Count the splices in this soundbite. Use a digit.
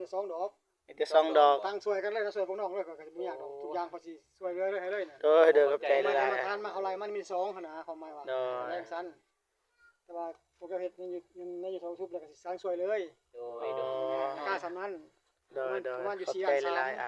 0